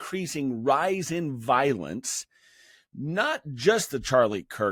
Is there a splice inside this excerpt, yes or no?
no